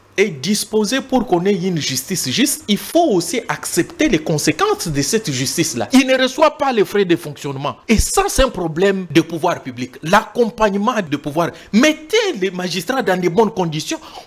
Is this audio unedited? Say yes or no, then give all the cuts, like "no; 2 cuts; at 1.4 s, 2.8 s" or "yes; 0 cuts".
no; 4 cuts; at 5.8 s, 7.7 s, 9.1 s, 11.1 s